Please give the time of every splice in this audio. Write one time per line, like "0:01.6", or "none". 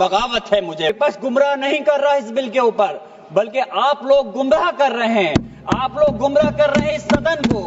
0:00.9